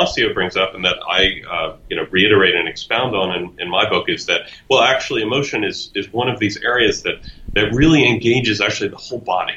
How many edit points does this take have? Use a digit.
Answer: 0